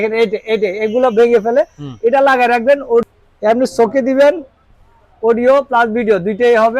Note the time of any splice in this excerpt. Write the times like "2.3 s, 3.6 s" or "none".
3.1 s